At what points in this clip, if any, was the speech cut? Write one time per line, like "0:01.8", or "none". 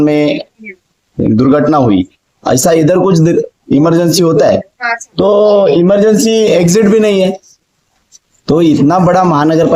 none